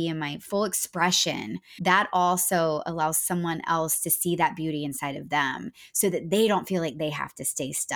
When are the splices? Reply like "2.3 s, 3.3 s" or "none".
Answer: 1.6 s